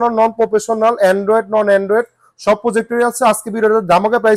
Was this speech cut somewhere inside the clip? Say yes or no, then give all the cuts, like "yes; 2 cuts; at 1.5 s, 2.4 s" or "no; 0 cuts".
no; 0 cuts